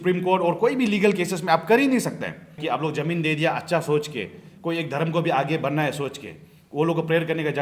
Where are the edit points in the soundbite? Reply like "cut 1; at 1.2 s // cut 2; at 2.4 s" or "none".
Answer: cut 1; at 2.6 s